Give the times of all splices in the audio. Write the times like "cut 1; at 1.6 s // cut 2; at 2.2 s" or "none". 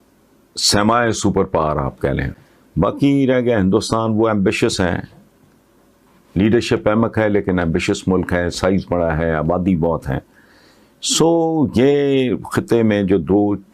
cut 1; at 2.3 s